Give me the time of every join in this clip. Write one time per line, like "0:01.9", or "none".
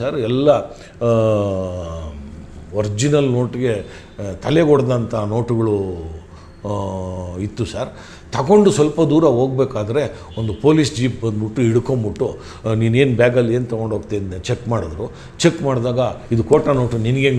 none